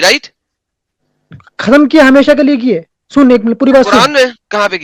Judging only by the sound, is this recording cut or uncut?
uncut